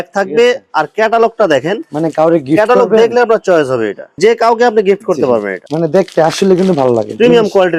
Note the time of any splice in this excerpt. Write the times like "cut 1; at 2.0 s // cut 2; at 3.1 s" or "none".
none